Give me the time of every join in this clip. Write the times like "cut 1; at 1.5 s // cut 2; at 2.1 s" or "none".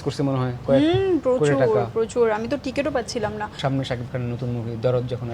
cut 1; at 3.6 s